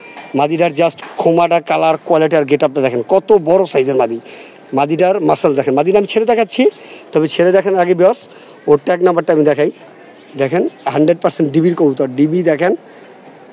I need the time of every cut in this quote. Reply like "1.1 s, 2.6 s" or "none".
none